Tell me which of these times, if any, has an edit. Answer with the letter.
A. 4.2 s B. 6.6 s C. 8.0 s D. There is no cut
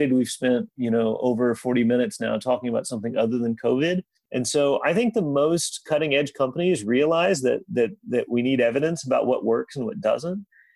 A